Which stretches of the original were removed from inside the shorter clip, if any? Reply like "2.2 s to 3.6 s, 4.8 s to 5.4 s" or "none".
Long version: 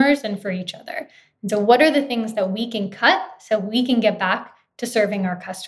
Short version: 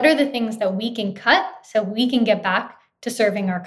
none